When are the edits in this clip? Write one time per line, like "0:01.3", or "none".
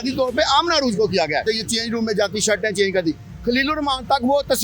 0:01.4